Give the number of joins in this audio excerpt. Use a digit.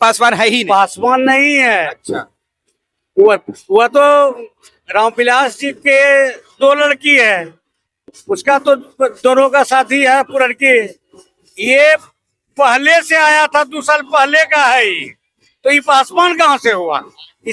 0